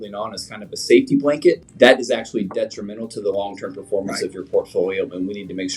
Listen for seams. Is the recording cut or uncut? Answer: cut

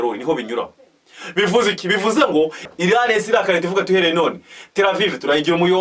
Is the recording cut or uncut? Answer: cut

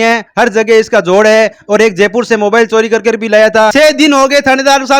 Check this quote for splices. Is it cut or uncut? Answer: cut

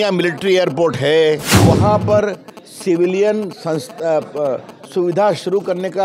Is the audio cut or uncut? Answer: cut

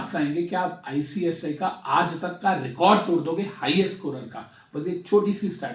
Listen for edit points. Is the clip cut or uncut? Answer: uncut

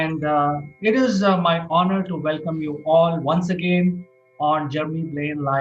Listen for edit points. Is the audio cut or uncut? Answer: uncut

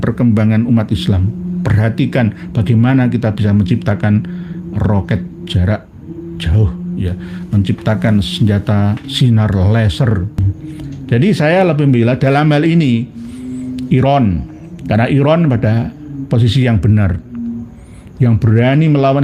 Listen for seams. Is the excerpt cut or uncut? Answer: cut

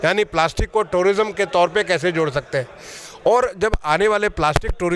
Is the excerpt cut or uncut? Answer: cut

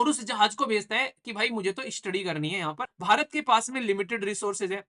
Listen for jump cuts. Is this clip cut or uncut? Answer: cut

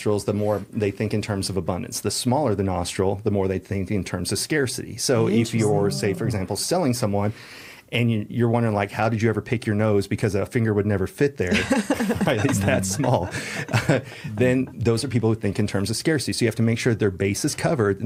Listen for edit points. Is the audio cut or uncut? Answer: uncut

